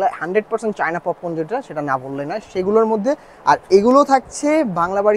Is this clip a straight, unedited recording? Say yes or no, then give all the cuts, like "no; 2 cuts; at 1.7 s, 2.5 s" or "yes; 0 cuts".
yes; 0 cuts